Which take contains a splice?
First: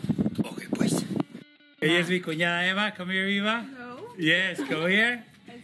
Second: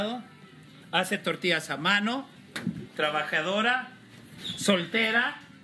first; 1 cut; at 1.4 s

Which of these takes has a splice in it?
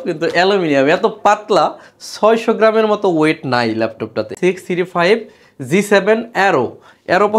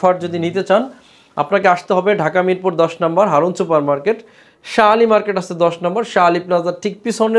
first; 1 cut; at 4.3 s

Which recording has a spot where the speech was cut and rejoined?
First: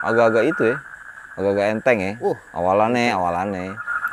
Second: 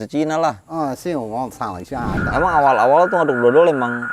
second; 1 cut; at 2.2 s

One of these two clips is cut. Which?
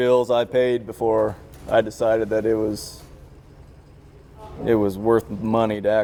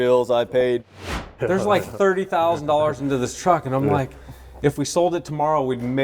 second; 1 cut; at 1.0 s

